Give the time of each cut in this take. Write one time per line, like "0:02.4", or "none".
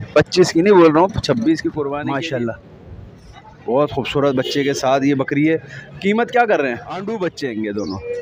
0:02.0
0:07.0